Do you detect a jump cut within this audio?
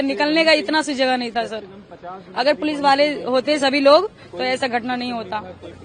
no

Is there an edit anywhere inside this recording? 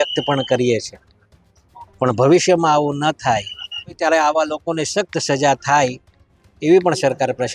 yes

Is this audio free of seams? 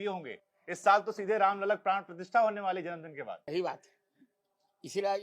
no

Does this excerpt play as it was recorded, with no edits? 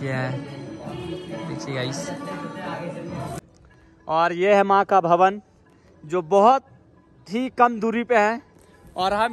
no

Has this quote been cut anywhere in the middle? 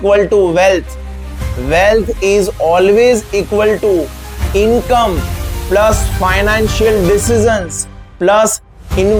no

